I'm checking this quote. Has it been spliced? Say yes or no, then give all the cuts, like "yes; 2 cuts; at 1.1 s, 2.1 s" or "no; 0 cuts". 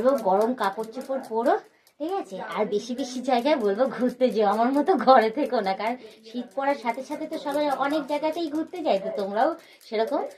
no; 0 cuts